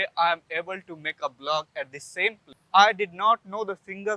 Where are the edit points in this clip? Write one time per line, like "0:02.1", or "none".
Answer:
0:02.5